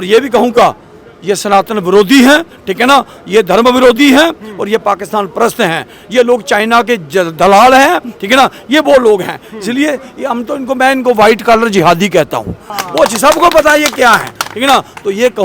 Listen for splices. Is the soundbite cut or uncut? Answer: cut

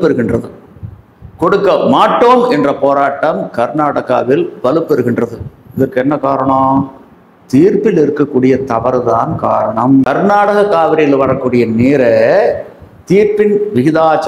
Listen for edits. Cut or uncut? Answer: cut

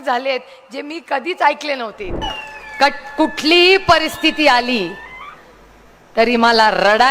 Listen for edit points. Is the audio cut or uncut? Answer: cut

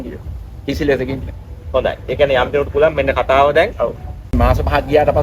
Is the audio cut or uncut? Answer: cut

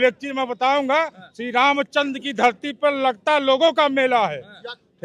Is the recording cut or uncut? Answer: uncut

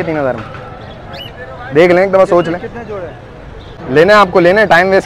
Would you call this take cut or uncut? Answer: cut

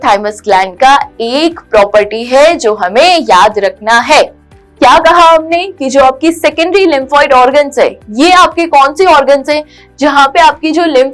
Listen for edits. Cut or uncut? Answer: cut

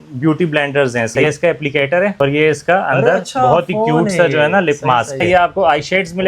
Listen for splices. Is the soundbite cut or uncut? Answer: cut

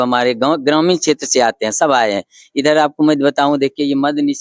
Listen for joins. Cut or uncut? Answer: uncut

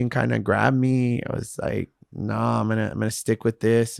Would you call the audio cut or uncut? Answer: uncut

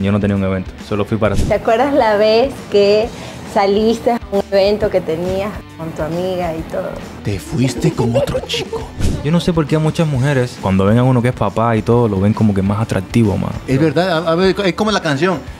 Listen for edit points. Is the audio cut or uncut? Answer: cut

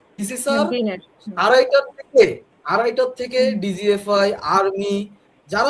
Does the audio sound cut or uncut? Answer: uncut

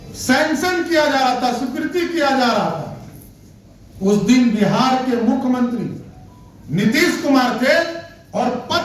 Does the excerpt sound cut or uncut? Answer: uncut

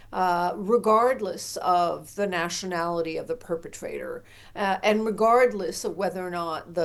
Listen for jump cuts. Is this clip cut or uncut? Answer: uncut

